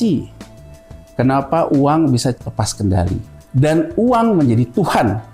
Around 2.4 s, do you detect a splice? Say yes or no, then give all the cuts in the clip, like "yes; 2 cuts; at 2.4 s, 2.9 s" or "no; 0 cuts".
yes; 2 cuts; at 2.4 s, 3.4 s